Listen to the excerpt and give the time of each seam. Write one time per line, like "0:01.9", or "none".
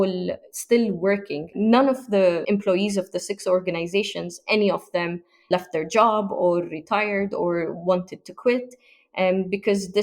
0:01.5